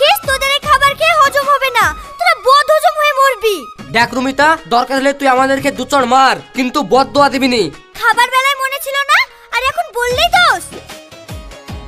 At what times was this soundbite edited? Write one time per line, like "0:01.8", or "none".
none